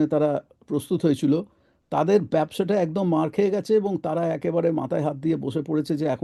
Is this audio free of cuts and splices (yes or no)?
yes